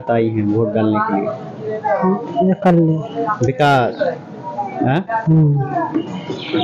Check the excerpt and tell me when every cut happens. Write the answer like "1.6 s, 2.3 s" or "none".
none